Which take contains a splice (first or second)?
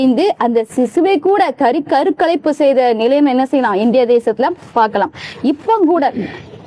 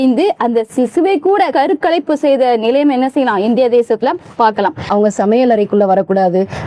second